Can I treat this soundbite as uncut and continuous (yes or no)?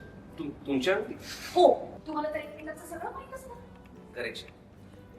no